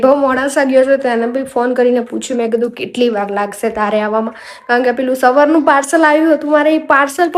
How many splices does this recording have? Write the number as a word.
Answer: zero